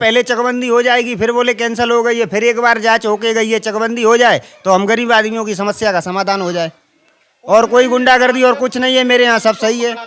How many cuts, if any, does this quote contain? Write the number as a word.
zero